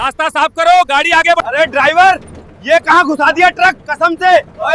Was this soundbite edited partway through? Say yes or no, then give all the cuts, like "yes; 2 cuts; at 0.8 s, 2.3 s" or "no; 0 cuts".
yes; 1 cut; at 1.4 s